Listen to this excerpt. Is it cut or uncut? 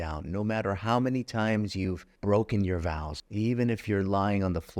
cut